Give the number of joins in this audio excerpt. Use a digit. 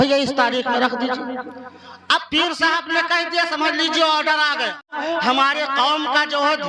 1